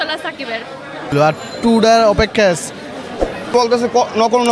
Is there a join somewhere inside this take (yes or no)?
yes